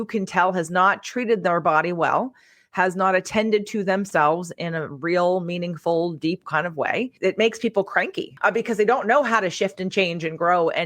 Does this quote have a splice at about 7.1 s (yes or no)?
yes